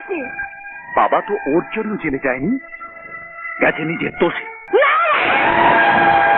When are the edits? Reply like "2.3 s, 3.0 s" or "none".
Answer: 4.5 s